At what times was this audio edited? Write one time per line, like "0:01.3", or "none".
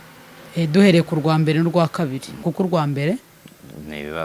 0:02.5